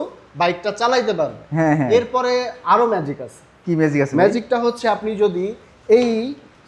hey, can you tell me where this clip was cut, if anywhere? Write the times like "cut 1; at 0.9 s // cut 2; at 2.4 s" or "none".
none